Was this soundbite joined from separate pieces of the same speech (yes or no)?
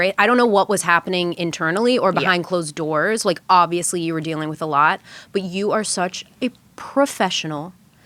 no